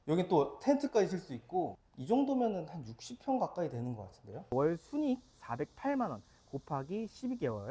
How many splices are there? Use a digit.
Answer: 1